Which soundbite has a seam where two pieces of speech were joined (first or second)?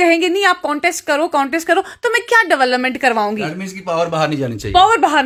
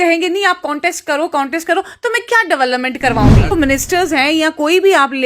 second